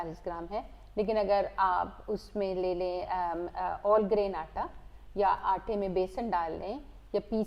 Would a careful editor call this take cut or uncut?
uncut